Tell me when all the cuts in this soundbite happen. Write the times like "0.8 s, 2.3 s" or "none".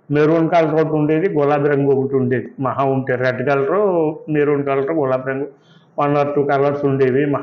none